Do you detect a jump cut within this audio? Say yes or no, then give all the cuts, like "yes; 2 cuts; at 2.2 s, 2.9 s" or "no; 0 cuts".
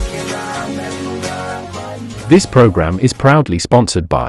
yes; 1 cut; at 2.1 s